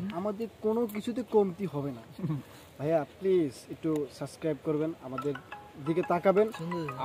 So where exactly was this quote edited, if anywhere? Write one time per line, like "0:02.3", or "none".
none